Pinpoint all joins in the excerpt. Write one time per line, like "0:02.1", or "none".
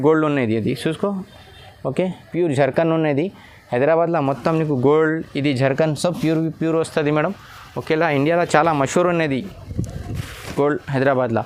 none